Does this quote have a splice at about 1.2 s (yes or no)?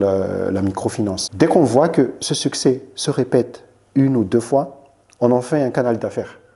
yes